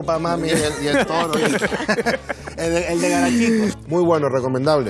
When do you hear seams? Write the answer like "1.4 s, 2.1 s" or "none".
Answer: 3.7 s